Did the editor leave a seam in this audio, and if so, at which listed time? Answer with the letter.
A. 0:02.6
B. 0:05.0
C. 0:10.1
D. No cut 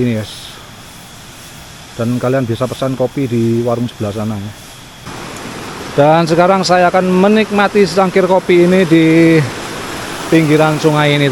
B